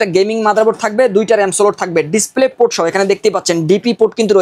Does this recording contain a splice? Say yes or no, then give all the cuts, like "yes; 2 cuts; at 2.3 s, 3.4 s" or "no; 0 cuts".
no; 0 cuts